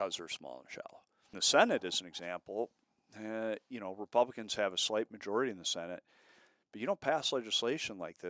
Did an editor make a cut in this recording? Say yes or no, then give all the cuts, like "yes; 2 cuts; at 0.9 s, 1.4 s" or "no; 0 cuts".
yes; 1 cut; at 1.4 s